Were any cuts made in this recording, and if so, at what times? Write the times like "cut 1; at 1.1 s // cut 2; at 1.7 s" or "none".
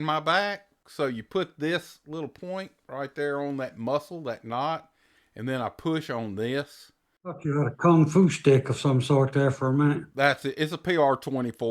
cut 1; at 7.4 s